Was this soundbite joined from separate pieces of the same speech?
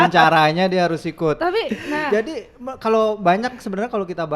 no; 0 cuts

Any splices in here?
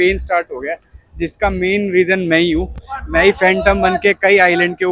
no; 0 cuts

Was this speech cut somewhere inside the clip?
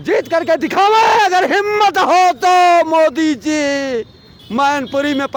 no; 0 cuts

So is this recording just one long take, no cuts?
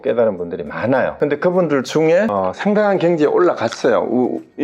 no; 2 cuts; at 1.1 s, 2.3 s

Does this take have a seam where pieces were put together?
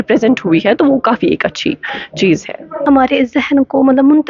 yes; 1 cut; at 2.7 s

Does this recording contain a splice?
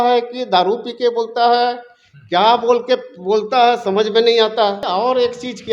yes; 1 cut; at 4.8 s

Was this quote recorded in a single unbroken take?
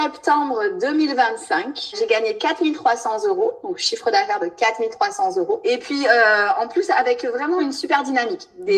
no; 3 cuts; at 1.9 s, 5.6 s, 7.6 s

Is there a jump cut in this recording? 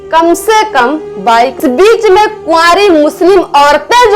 yes; 1 cut; at 1.6 s

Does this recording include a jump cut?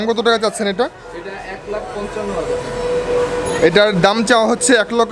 no; 0 cuts

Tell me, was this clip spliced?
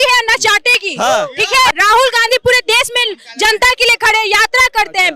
yes; 1 cut; at 1.7 s

